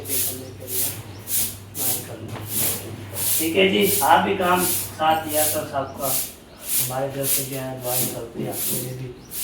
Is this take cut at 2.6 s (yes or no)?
no